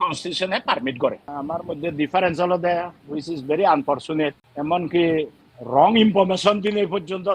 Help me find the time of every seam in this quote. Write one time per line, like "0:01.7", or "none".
0:01.3
0:04.5